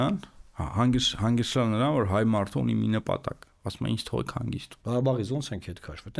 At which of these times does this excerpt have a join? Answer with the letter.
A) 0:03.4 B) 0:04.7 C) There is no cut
B